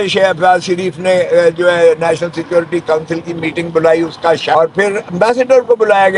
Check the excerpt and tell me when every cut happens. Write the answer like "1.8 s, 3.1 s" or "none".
4.5 s